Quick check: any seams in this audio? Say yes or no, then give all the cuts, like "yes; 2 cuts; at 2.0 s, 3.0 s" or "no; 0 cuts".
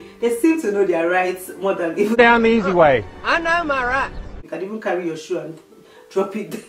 yes; 2 cuts; at 2.2 s, 4.4 s